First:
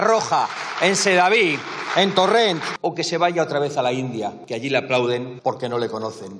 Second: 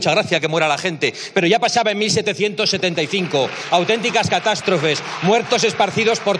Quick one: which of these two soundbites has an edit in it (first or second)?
first